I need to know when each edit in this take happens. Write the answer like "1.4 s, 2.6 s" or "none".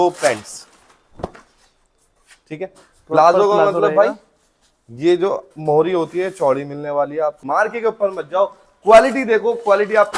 7.4 s